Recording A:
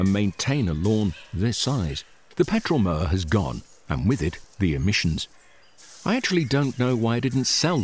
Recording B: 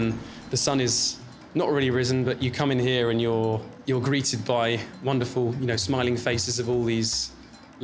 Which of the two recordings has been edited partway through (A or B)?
B